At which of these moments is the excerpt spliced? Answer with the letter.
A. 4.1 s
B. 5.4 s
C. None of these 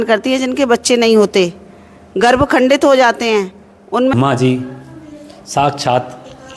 A